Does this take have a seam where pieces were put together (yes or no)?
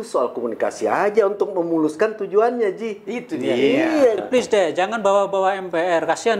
yes